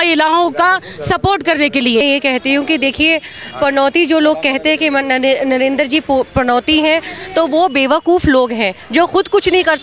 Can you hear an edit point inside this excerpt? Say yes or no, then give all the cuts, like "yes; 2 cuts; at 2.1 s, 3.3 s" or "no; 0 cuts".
yes; 1 cut; at 2.0 s